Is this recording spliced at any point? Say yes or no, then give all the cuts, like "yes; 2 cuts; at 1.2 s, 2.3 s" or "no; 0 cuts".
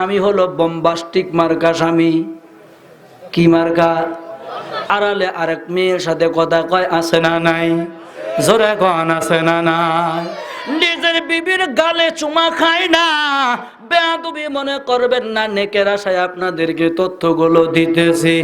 yes; 1 cut; at 4.9 s